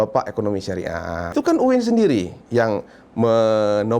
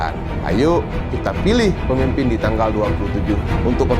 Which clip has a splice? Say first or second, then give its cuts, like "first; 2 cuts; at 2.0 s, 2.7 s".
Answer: first; 1 cut; at 1.3 s